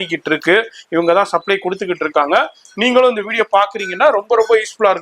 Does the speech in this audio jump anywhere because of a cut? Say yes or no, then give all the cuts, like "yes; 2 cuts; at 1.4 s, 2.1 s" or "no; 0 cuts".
no; 0 cuts